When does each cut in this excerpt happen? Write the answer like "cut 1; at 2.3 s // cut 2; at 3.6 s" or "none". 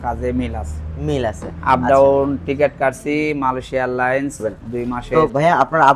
cut 1; at 5.1 s